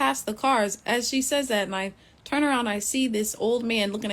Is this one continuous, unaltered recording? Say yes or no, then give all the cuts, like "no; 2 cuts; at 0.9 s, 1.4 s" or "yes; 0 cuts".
yes; 0 cuts